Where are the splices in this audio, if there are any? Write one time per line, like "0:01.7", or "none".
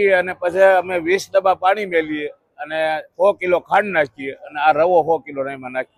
none